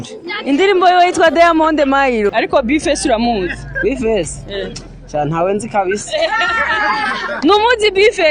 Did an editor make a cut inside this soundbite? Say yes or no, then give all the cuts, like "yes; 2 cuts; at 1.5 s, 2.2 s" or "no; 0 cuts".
yes; 1 cut; at 2.3 s